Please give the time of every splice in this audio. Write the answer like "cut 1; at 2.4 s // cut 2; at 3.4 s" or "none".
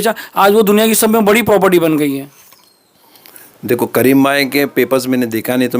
none